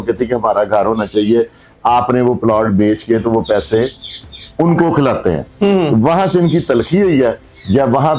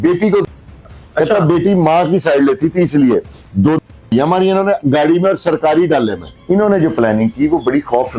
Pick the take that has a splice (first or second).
second